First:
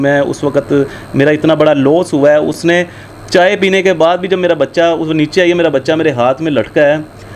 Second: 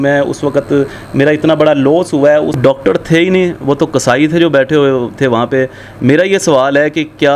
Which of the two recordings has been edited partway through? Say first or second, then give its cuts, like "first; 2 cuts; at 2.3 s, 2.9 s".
second; 1 cut; at 2.6 s